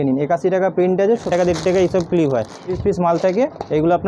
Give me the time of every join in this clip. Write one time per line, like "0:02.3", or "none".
0:01.2
0:02.7